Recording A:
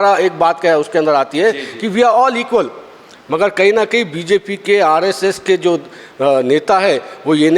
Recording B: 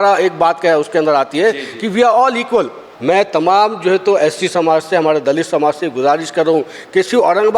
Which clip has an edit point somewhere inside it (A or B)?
B